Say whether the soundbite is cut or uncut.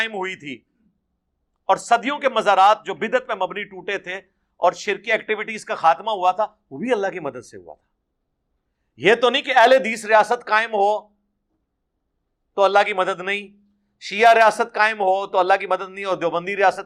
uncut